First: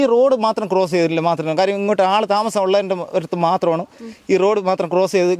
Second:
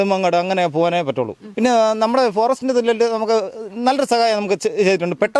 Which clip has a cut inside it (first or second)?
second